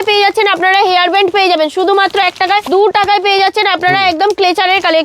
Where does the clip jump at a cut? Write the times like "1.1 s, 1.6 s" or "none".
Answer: 2.7 s